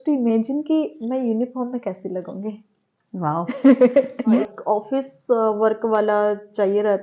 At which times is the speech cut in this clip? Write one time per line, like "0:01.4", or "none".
0:04.4